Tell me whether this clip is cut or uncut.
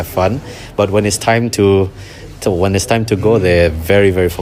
uncut